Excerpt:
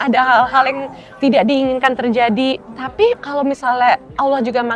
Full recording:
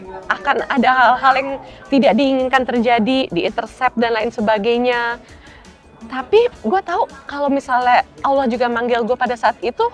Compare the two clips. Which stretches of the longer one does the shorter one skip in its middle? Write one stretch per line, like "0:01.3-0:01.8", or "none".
0:03.8-0:07.1